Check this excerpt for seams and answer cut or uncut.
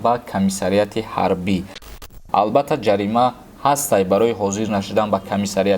cut